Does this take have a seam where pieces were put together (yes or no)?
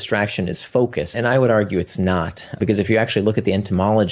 yes